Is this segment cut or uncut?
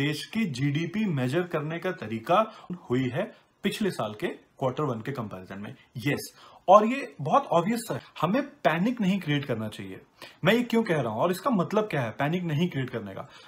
cut